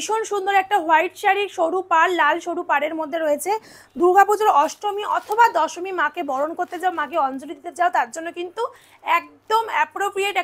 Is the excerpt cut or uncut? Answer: uncut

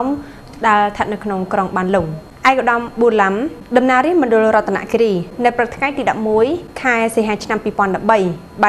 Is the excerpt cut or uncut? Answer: cut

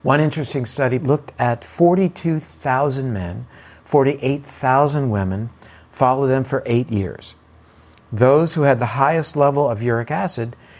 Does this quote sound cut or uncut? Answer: cut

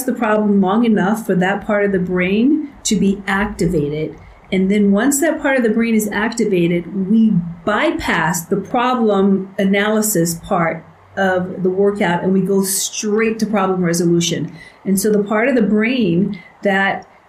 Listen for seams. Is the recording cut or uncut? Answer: uncut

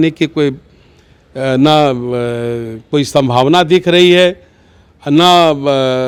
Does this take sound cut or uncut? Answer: uncut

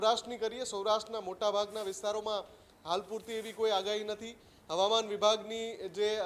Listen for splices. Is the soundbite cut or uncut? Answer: uncut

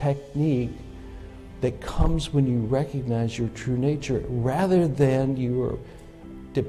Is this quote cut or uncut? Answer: uncut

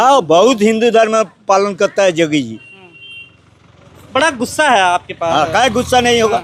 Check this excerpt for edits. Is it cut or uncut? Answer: uncut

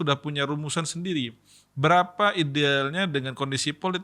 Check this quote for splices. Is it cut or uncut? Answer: uncut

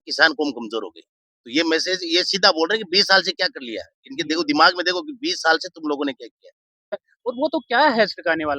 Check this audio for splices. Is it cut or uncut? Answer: cut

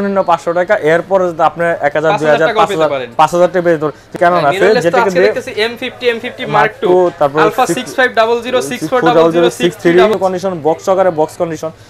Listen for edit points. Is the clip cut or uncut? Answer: cut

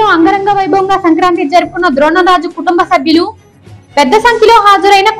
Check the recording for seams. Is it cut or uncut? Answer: uncut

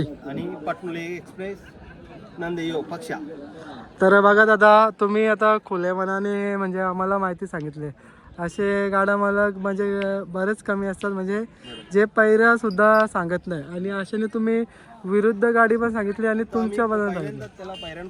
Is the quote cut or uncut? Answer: uncut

